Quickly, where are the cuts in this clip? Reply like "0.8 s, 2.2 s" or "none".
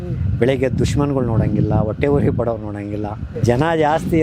3.3 s